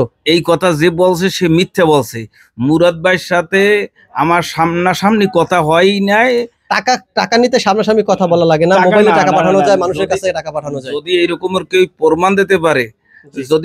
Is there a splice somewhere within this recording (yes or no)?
no